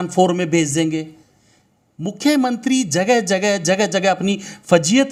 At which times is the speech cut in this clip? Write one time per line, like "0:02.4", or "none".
none